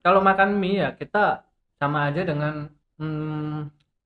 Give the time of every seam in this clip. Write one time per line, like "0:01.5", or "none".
0:01.6
0:02.8

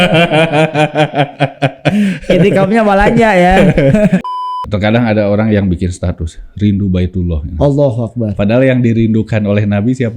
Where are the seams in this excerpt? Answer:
0:04.2

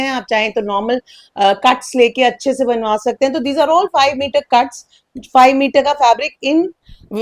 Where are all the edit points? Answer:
none

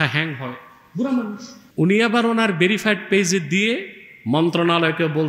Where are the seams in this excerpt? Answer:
0:01.5

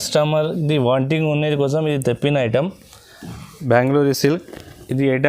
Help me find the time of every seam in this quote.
0:03.5

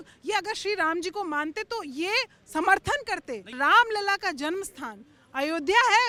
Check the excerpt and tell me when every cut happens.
none

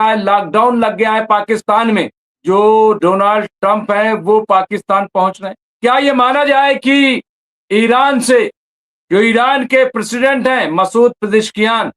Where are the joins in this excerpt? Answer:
0:02.2

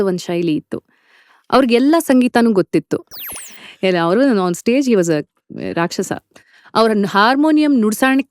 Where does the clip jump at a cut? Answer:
0:03.0

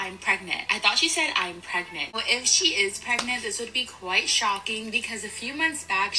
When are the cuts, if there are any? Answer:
0:02.1

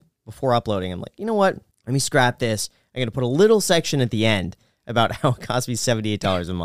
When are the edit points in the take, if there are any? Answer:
0:01.7

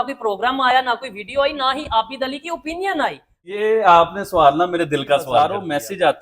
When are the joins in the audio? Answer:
0:03.5
0:05.5

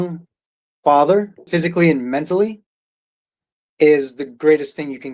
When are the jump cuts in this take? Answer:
0:01.4

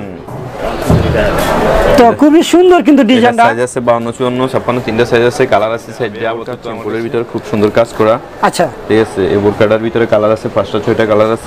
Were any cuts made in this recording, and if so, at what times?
0:06.6

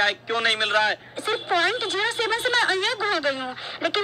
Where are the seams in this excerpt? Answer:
0:01.1

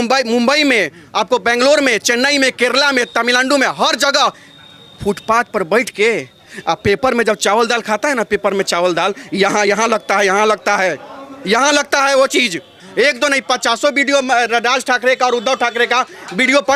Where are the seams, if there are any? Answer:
0:12.8

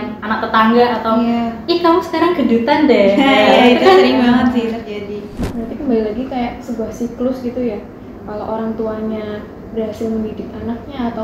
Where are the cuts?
0:05.5

